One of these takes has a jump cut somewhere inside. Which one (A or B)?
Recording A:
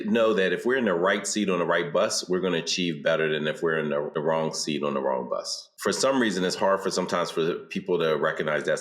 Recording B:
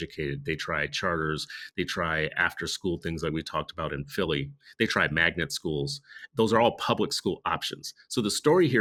A